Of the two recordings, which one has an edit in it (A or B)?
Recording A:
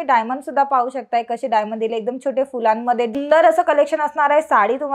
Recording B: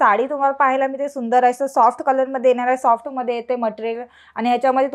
A